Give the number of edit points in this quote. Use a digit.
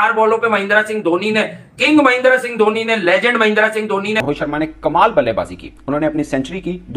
1